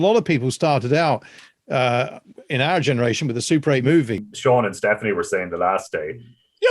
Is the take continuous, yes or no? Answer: no